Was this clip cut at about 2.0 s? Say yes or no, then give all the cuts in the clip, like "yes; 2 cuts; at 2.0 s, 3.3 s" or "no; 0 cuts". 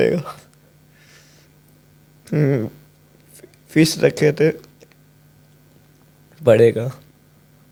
no; 0 cuts